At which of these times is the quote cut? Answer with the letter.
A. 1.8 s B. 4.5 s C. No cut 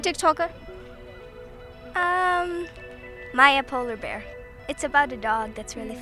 C